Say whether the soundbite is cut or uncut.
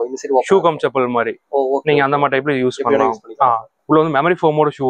cut